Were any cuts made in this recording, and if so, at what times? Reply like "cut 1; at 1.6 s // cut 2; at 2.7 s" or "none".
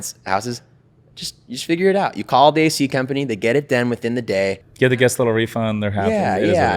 cut 1; at 4.7 s